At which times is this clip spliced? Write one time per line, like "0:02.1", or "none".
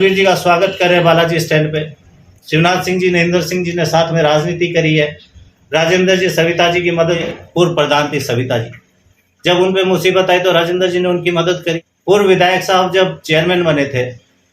0:07.2
0:11.9